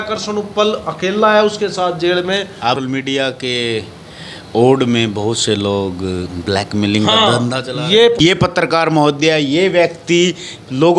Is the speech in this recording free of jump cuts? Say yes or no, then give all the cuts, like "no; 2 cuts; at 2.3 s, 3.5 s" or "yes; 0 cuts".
no; 2 cuts; at 2.7 s, 8.2 s